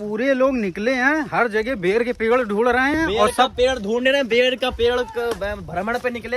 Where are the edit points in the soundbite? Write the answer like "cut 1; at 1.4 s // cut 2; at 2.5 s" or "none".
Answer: none